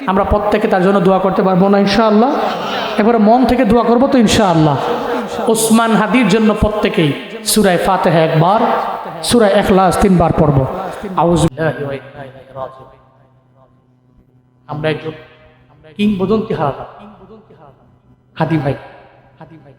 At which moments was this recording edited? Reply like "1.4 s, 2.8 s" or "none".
11.5 s